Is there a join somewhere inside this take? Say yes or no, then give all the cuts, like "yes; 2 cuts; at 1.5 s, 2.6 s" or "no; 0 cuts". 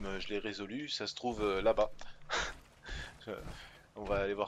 yes; 1 cut; at 3.5 s